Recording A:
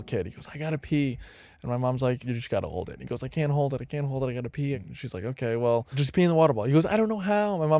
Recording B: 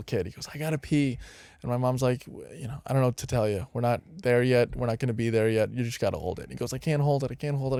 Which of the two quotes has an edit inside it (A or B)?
A